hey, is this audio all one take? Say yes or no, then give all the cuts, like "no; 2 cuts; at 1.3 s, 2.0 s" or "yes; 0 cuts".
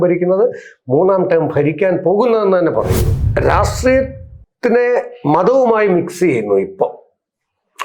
no; 1 cut; at 3.2 s